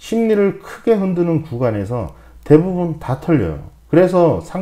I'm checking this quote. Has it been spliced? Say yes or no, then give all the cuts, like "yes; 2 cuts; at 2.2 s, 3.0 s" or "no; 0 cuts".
no; 0 cuts